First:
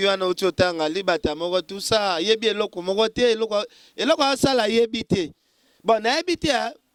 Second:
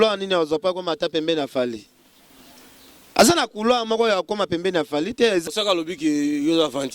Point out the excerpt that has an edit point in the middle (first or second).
second